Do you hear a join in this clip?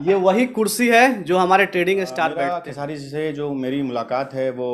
yes; 1 cut; at 2.4 s

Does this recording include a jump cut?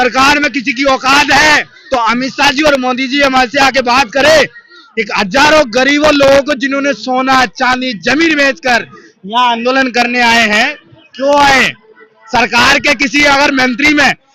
no; 0 cuts

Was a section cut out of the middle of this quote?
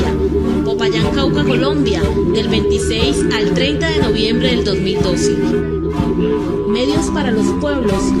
yes; 1 cut; at 2.0 s

